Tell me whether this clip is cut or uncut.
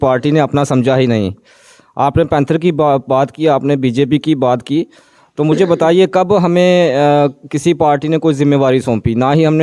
uncut